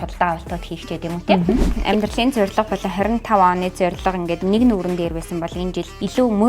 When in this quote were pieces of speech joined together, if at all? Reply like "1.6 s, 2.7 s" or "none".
1.7 s